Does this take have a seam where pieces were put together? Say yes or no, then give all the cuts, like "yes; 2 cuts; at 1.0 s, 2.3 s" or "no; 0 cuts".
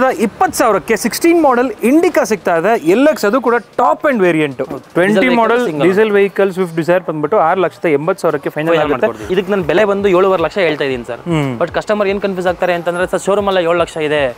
yes; 2 cuts; at 4.7 s, 9.3 s